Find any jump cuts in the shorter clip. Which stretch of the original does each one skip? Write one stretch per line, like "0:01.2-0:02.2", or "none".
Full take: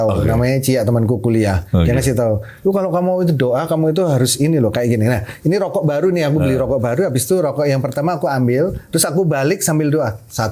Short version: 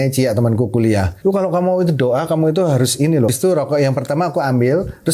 0:01.6-0:02.5
0:04.7-0:07.2